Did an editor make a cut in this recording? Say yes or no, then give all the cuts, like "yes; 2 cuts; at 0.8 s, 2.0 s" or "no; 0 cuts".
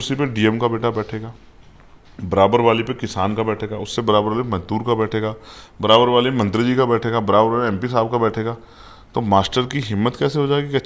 no; 0 cuts